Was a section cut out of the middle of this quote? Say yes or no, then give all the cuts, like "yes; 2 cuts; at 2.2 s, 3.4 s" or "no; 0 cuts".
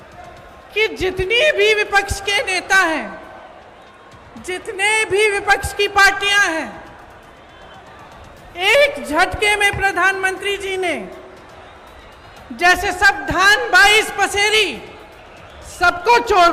no; 0 cuts